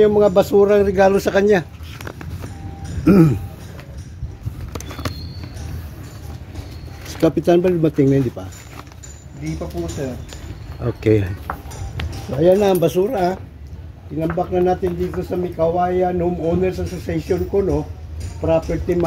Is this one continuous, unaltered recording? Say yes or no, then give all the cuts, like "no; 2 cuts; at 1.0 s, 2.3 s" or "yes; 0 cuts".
yes; 0 cuts